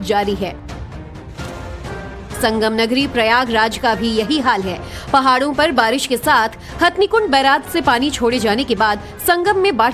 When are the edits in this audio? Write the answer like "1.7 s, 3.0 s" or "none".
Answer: 3.9 s